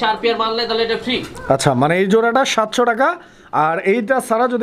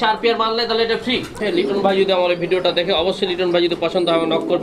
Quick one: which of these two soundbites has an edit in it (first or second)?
second